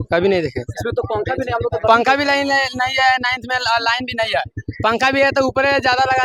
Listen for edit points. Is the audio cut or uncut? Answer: uncut